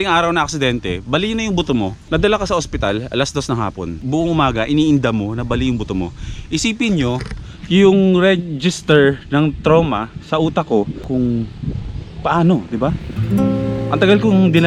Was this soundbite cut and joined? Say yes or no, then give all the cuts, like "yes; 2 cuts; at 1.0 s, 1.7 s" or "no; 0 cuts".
yes; 3 cuts; at 2.0 s, 4.0 s, 11.0 s